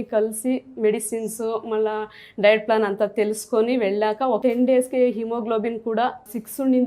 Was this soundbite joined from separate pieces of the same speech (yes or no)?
yes